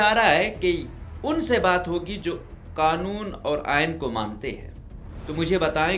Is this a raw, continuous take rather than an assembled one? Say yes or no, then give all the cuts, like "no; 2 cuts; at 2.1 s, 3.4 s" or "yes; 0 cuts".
yes; 0 cuts